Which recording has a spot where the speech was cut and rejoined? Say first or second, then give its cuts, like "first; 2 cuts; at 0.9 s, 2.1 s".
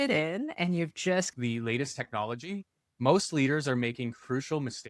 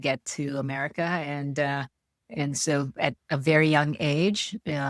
first; 1 cut; at 1.3 s